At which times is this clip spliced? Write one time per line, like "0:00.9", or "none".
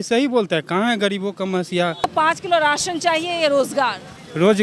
0:02.1